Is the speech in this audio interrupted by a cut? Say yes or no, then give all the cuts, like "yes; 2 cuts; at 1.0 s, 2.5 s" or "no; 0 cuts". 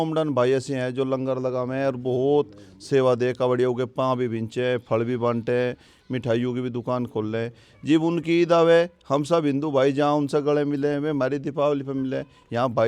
no; 0 cuts